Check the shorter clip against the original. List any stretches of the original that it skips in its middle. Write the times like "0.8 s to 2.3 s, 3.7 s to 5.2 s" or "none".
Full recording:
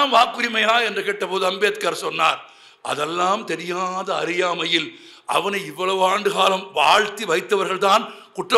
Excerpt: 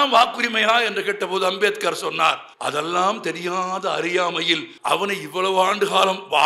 2.5 s to 2.7 s, 5.0 s to 5.2 s